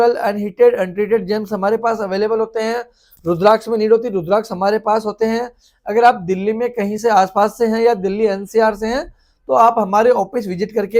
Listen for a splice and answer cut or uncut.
uncut